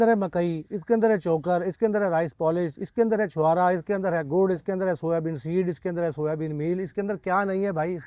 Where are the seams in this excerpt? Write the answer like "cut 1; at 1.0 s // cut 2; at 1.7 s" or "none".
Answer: none